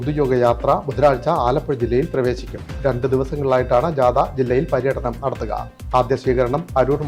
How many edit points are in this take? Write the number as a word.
zero